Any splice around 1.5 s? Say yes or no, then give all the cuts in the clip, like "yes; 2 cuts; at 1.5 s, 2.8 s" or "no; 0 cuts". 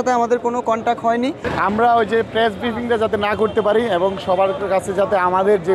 yes; 1 cut; at 1.5 s